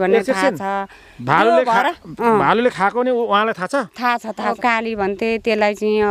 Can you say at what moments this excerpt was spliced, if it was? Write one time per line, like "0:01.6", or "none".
0:04.6